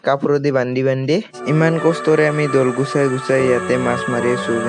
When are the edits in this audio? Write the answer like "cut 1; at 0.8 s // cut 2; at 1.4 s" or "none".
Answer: cut 1; at 1.4 s